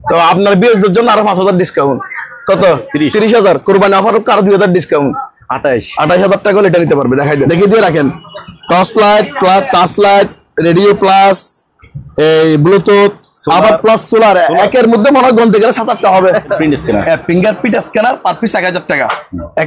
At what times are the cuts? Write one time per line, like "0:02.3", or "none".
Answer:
0:07.5
0:16.5